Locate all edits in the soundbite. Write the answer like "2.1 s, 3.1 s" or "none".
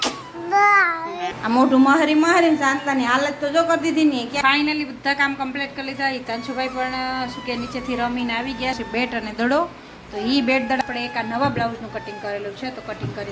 4.3 s